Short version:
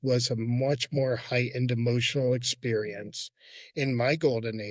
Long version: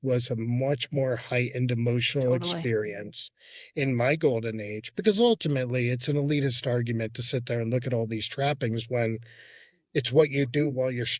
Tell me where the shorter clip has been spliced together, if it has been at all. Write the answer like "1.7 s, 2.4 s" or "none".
none